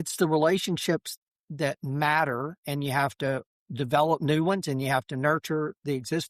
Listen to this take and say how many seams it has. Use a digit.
2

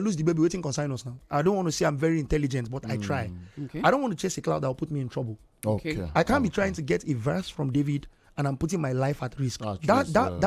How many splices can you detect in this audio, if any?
1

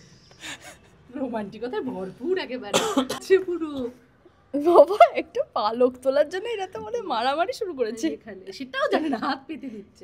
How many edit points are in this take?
1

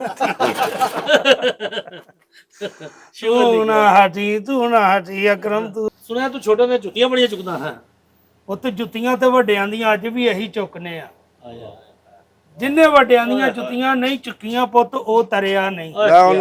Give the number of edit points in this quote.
1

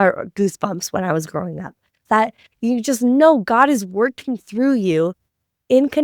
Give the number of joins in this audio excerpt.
1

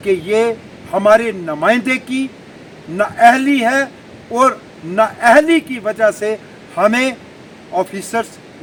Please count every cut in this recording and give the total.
0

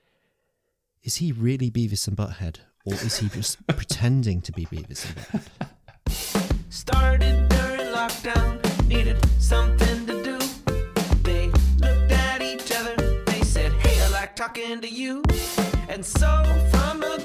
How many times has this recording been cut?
1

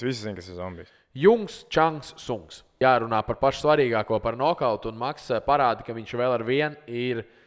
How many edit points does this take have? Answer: 1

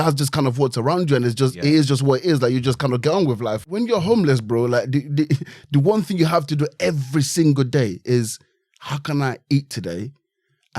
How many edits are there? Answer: 1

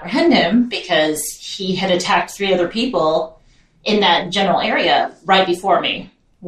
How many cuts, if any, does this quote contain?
0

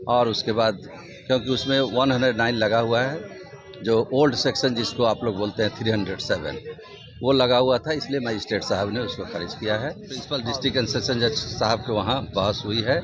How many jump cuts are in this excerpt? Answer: 1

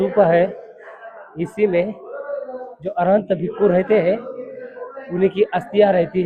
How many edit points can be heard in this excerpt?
0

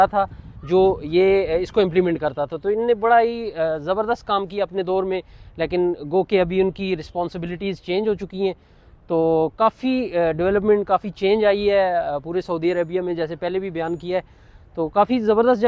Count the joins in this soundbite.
0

